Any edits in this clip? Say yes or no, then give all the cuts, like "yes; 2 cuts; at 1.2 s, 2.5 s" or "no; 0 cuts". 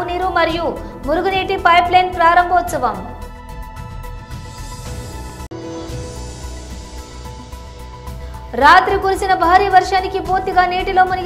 yes; 4 cuts; at 3.1 s, 5.2 s, 7.0 s, 8.5 s